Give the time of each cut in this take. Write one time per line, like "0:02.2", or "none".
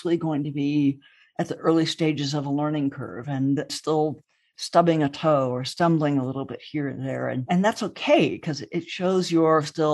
0:03.7